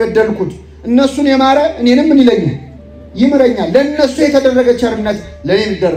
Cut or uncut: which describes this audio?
uncut